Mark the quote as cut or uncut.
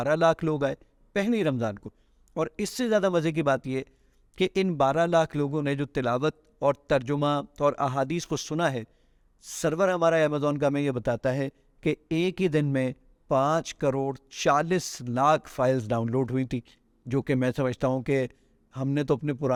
uncut